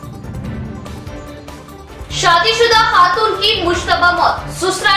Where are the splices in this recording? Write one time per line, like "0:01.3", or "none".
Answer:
0:01.4